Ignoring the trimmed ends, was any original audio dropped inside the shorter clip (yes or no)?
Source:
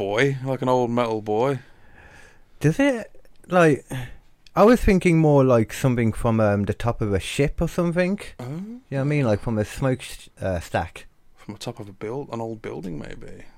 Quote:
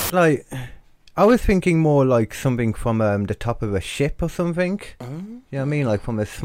no